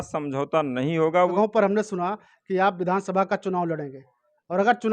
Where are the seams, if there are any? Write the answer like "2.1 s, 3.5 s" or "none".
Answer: 1.3 s